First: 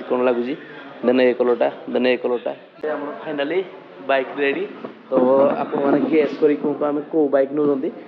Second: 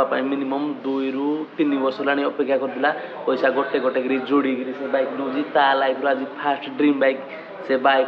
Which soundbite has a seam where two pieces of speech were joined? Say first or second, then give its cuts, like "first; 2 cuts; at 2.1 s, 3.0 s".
first; 1 cut; at 2.7 s